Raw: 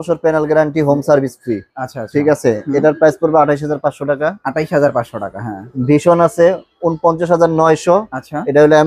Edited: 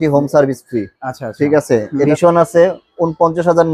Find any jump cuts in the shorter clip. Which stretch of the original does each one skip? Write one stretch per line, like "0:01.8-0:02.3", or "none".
0:02.8-0:05.9